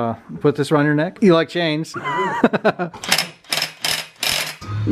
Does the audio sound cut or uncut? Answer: uncut